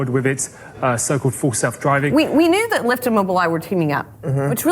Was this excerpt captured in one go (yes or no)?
no